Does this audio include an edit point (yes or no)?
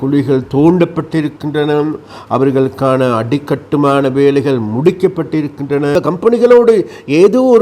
yes